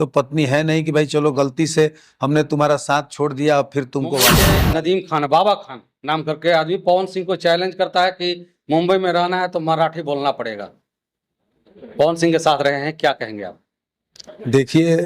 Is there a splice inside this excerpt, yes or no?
yes